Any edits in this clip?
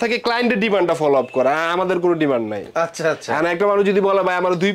no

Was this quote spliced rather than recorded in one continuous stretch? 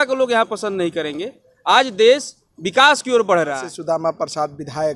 yes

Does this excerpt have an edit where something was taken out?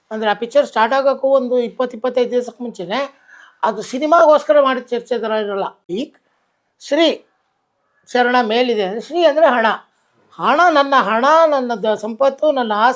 yes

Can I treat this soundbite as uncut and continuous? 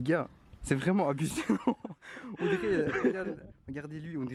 yes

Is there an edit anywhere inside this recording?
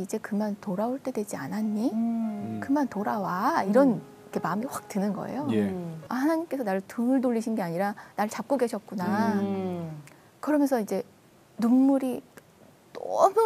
yes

